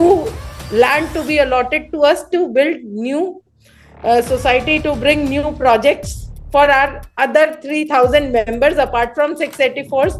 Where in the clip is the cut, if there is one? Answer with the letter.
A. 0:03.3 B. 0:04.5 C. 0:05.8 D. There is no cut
D